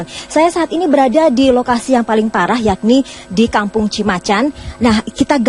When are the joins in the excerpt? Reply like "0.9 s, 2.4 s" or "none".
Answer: 1.8 s